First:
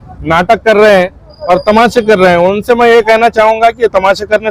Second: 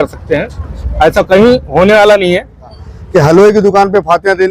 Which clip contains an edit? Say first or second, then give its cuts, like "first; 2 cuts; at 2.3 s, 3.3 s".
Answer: second; 1 cut; at 2.7 s